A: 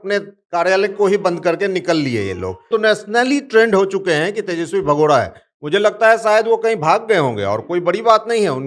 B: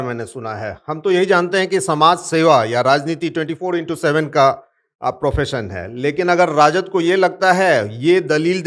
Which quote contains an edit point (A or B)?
A